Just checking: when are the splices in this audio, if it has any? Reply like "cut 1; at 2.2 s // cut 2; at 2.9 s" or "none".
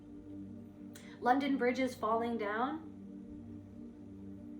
cut 1; at 2.9 s

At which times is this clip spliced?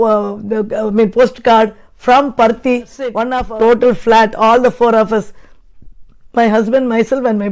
cut 1; at 3.3 s

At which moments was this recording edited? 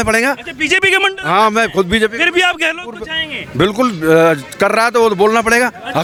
none

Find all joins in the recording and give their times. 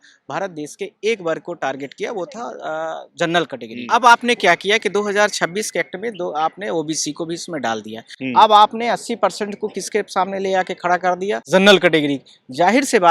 cut 1; at 3.8 s // cut 2; at 8.1 s // cut 3; at 11.4 s

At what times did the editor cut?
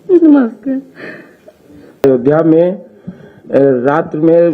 cut 1; at 2.0 s

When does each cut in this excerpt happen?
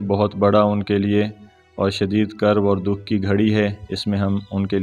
none

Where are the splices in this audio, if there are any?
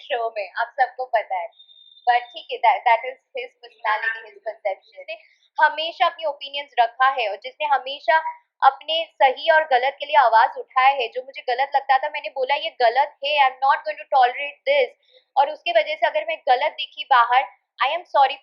cut 1; at 5.4 s

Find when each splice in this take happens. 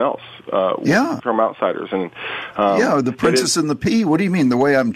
cut 1; at 1.1 s

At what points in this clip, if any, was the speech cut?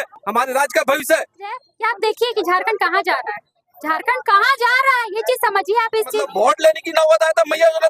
cut 1; at 1.7 s // cut 2; at 6.2 s

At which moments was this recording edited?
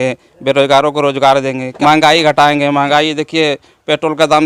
cut 1; at 1.6 s

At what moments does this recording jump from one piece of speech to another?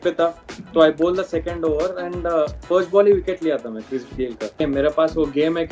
cut 1; at 4.5 s

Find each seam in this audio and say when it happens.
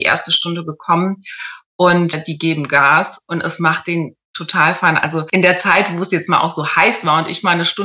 cut 1; at 5.3 s

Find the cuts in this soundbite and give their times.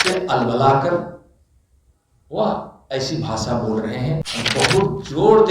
cut 1; at 4.3 s

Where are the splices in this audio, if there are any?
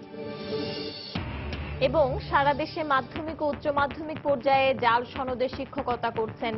none

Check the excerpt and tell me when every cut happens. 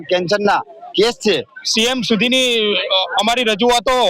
cut 1; at 1.5 s

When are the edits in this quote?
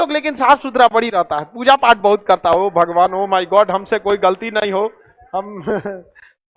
none

